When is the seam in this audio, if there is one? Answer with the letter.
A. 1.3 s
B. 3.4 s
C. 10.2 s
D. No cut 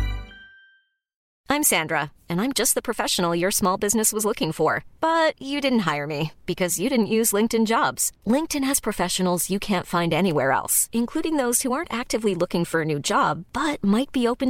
A